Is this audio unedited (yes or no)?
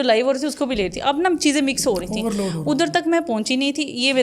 yes